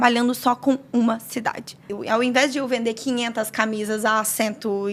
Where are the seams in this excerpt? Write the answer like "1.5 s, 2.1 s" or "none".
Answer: 1.9 s